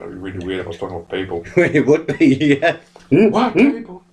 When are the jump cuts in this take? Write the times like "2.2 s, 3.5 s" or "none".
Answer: 2.9 s

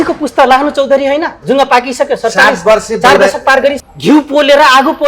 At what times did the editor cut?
3.8 s

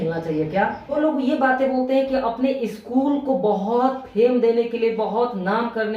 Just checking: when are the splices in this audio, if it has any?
1.0 s

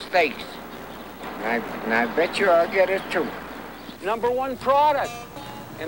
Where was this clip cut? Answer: 1.2 s, 4.0 s

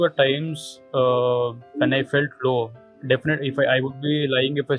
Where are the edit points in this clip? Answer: none

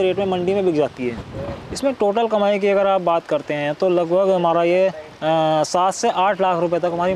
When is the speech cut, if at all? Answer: 1.2 s

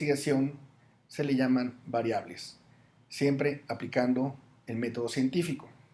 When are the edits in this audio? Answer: 1.4 s

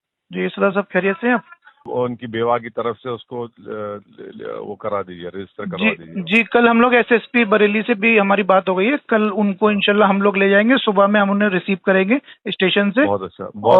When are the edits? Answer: none

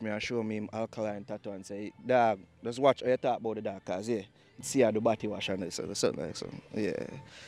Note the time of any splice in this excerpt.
4.6 s

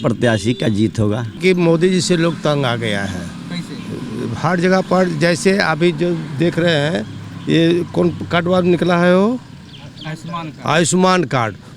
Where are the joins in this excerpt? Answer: 1.4 s

